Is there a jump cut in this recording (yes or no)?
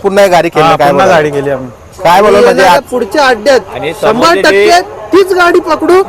no